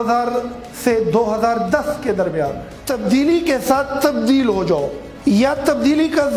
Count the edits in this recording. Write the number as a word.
one